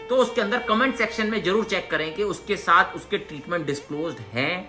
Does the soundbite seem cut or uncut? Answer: uncut